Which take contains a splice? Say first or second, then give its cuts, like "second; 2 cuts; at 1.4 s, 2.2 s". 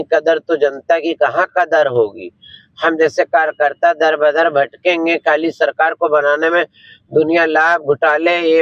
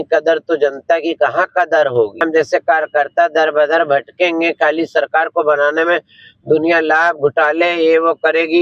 second; 1 cut; at 2.1 s